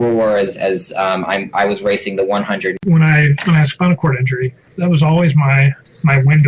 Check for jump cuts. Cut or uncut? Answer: cut